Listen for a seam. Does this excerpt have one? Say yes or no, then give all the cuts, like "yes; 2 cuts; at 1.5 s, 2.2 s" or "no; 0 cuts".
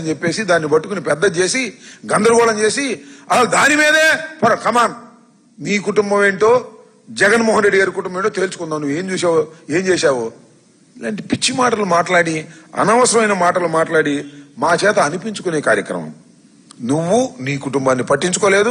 no; 0 cuts